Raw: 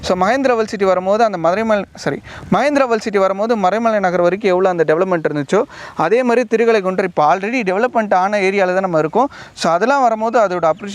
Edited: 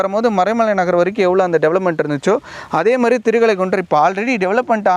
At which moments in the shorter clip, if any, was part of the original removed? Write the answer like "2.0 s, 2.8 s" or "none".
none